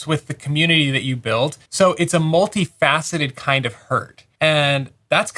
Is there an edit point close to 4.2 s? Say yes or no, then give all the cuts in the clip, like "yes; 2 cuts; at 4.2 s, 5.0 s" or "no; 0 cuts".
yes; 2 cuts; at 1.6 s, 4.2 s